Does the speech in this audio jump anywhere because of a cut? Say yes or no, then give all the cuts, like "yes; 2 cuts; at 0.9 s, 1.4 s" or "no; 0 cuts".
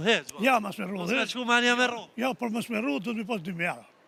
no; 0 cuts